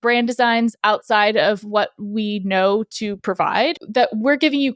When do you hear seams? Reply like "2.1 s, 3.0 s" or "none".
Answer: 3.8 s